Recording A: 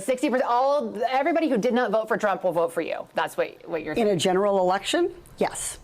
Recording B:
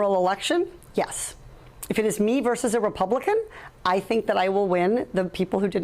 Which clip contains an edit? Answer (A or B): A